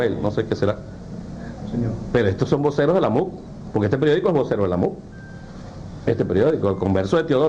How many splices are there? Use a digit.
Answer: 1